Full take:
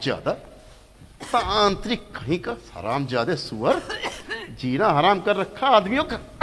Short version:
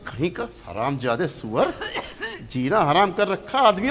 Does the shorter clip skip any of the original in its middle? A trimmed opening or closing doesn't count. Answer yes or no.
no